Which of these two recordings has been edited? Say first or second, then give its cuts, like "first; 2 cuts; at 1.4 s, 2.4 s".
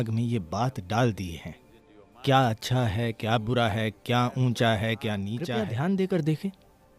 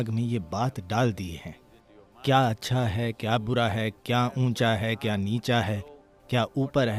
first; 1 cut; at 5.5 s